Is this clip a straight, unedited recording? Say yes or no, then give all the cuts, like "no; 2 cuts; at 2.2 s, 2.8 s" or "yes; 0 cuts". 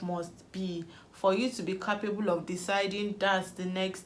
yes; 0 cuts